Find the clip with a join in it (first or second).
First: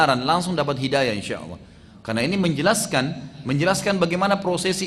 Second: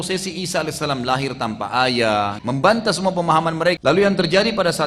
second